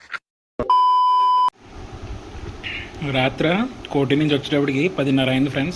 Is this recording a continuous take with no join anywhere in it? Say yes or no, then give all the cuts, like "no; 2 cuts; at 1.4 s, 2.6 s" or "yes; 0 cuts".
no; 1 cut; at 1.5 s